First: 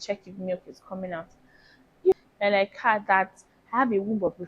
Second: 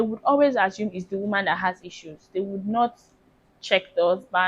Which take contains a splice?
first; 1 cut; at 2.2 s

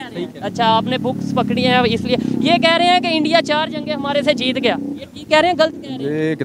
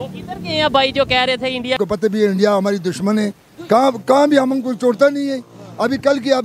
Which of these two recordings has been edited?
second; 1 cut; at 1.8 s

